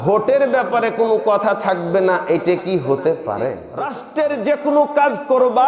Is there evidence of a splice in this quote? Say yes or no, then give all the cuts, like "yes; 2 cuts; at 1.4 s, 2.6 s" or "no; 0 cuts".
yes; 1 cut; at 4.0 s